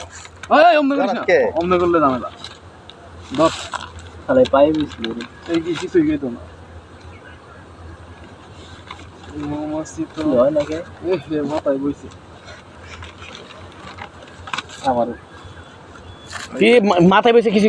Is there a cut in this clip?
no; 0 cuts

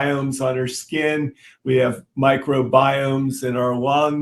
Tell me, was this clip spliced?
no; 0 cuts

